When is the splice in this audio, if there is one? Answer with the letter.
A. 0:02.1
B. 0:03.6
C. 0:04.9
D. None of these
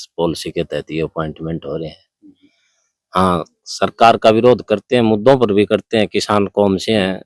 D